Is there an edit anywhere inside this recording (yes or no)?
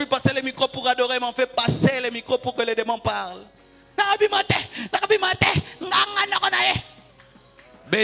no